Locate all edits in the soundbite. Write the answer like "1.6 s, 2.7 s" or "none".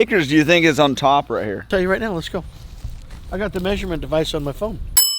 1.6 s

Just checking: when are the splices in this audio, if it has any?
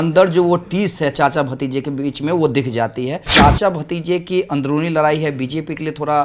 3.3 s

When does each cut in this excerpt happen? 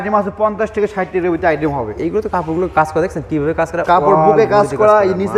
none

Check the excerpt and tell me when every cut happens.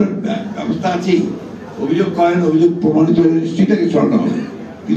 none

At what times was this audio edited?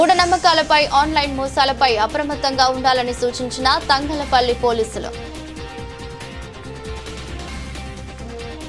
none

